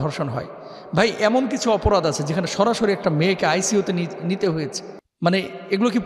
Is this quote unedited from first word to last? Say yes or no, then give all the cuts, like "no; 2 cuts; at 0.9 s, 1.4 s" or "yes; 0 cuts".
yes; 0 cuts